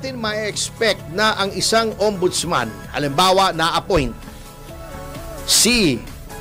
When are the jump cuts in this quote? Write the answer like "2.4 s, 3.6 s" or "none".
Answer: none